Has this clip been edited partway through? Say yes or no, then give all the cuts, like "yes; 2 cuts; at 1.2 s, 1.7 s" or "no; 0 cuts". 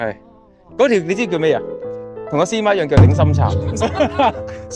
no; 0 cuts